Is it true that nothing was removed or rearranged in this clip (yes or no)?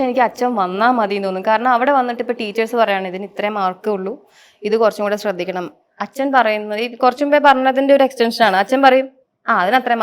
yes